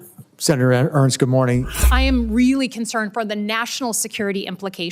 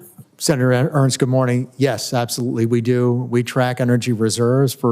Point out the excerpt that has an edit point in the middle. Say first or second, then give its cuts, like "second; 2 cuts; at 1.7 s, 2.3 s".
first; 1 cut; at 1.8 s